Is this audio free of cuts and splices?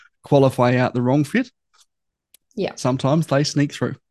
yes; 0 cuts

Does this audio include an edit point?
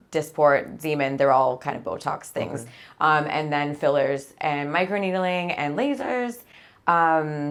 no; 0 cuts

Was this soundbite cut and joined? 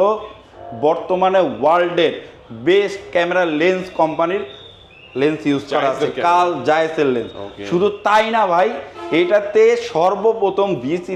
no; 0 cuts

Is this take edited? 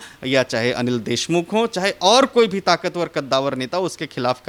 no; 0 cuts

